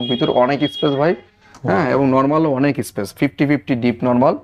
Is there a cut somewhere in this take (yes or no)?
no